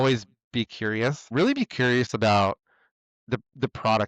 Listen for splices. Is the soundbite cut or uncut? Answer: cut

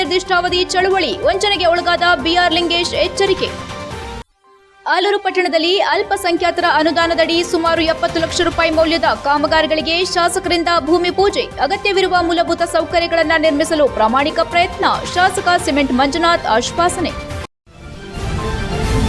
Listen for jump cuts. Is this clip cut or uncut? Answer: cut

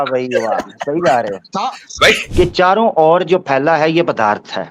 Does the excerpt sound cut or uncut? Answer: cut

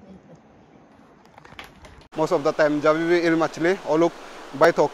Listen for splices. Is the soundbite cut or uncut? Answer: cut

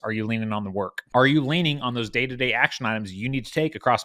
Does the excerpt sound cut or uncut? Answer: cut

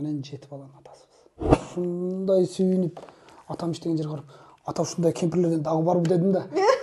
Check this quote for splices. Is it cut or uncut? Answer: cut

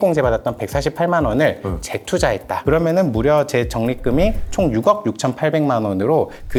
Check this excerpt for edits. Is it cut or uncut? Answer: uncut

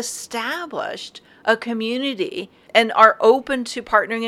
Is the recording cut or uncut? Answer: cut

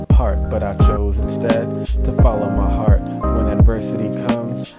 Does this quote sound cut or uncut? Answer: uncut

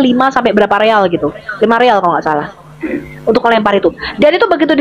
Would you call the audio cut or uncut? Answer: uncut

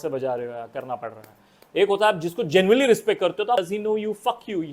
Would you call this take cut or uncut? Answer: cut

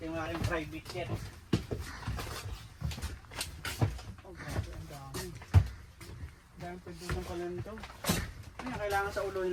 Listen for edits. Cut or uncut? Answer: uncut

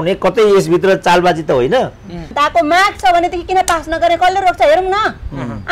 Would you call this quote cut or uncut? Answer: cut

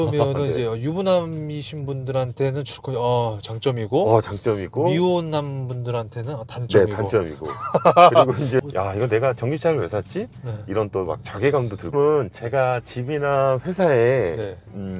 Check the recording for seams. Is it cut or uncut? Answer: cut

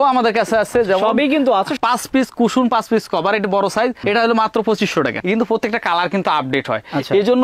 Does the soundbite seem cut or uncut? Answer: cut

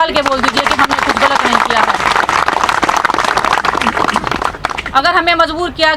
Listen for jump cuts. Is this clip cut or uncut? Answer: uncut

